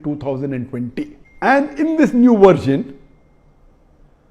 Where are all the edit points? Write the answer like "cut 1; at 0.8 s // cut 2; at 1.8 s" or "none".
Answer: cut 1; at 1.2 s